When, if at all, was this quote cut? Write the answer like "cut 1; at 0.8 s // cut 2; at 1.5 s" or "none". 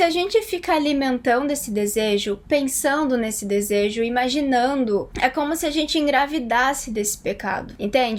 none